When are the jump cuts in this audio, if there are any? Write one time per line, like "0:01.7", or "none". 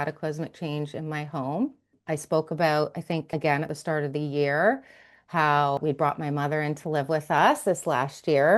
0:02.0
0:03.5
0:05.8